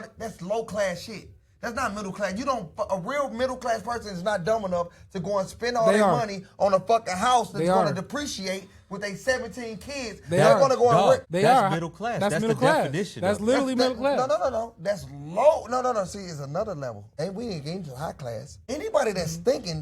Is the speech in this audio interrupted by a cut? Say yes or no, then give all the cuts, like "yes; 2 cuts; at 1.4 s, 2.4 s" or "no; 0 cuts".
yes; 3 cuts; at 11.3 s, 17.0 s, 18.5 s